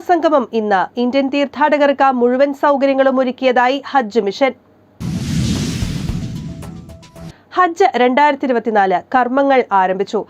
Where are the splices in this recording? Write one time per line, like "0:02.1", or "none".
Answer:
0:04.9
0:07.3